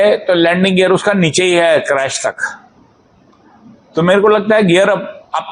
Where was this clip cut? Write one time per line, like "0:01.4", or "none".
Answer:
none